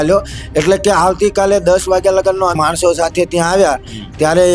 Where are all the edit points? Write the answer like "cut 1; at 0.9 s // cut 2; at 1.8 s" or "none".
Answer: cut 1; at 2.6 s